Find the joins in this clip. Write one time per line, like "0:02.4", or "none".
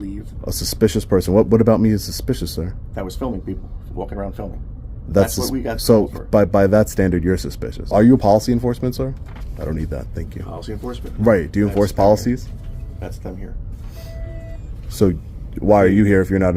0:07.9